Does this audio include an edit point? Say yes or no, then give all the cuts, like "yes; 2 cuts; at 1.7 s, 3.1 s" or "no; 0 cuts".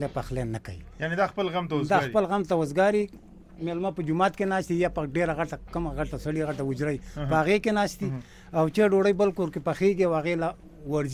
no; 0 cuts